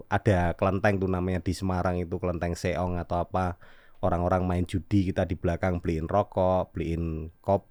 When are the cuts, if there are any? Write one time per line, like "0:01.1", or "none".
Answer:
none